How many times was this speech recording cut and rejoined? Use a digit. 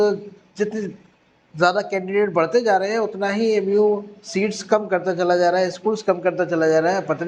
0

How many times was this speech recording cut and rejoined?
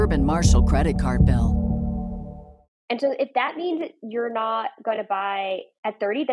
1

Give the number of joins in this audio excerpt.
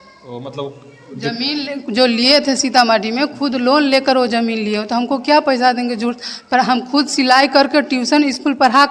0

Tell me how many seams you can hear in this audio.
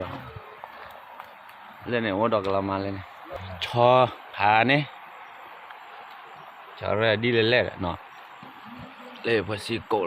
1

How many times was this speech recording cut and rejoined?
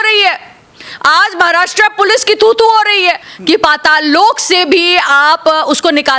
1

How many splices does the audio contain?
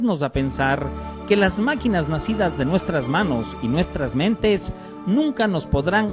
1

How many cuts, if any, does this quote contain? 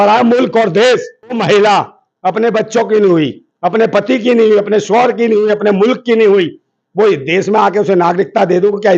1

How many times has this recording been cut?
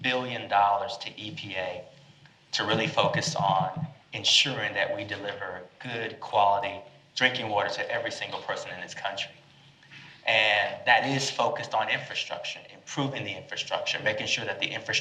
0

